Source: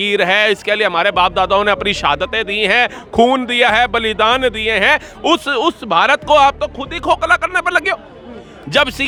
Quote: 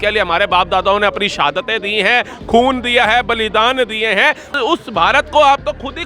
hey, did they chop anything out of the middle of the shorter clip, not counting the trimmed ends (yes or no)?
yes